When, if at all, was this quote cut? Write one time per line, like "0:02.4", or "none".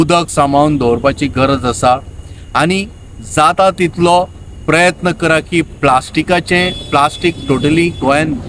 none